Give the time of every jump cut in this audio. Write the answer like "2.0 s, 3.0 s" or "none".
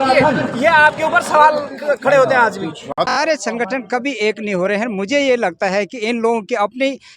3.1 s